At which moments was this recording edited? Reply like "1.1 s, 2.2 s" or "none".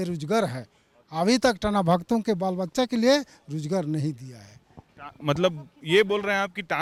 none